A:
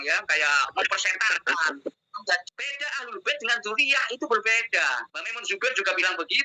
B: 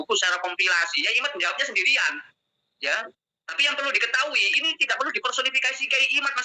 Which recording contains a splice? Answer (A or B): A